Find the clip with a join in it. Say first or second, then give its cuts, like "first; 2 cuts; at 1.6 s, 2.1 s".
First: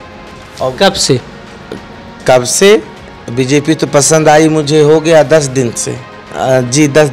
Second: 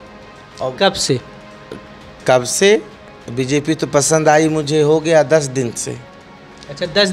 first; 1 cut; at 6.2 s